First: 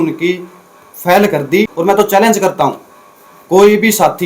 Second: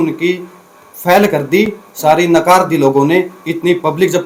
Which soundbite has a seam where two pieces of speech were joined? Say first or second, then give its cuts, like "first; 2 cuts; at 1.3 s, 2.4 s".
first; 1 cut; at 1.7 s